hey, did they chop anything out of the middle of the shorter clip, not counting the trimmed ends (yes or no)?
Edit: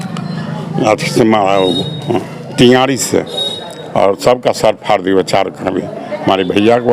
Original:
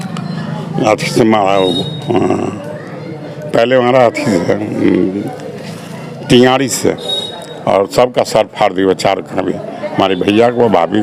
yes